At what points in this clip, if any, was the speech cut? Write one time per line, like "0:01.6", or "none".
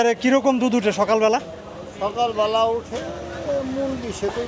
none